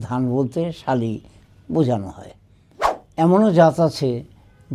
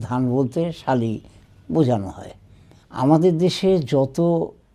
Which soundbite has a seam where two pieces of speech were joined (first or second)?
first